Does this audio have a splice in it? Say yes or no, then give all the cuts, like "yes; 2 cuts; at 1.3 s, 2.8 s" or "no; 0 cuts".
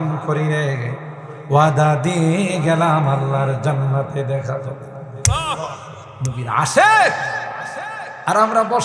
yes; 1 cut; at 6.0 s